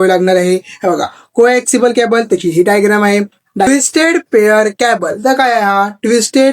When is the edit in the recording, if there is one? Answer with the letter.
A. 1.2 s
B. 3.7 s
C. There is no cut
B